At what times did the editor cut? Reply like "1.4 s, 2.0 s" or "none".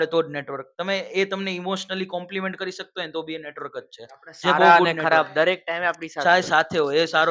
none